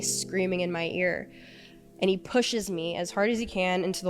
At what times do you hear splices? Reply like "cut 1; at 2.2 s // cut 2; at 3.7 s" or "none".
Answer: none